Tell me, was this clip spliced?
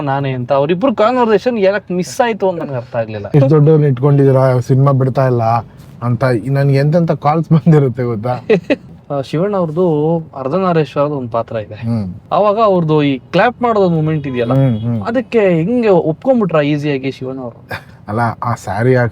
yes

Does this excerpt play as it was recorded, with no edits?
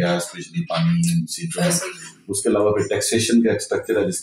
yes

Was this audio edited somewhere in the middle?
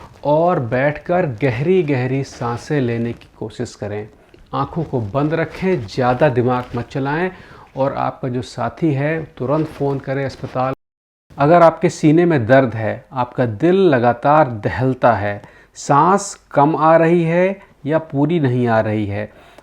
yes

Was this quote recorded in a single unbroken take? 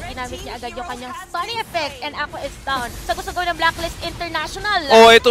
no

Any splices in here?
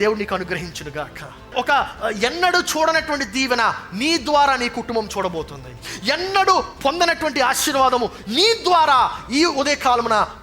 yes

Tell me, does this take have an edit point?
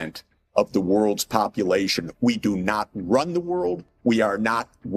yes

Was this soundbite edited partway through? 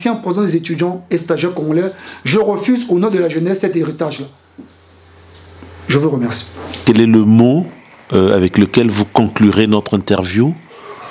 no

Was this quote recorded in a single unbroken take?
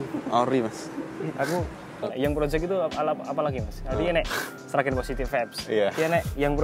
no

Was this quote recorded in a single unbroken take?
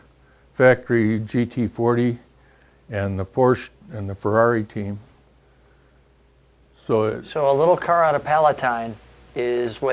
yes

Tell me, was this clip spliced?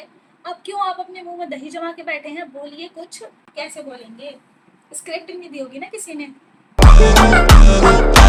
no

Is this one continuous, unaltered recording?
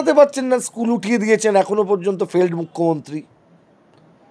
yes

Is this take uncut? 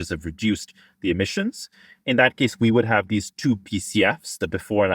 yes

